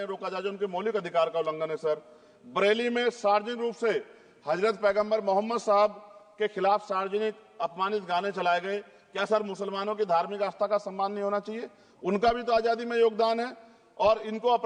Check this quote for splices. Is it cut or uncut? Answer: uncut